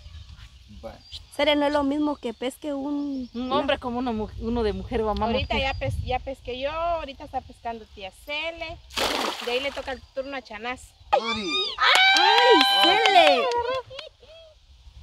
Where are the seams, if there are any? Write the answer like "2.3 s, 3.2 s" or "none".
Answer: 11.1 s